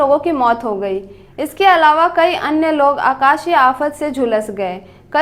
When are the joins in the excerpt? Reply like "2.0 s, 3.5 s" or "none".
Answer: none